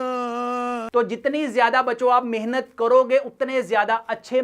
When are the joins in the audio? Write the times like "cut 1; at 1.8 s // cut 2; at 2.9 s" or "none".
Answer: none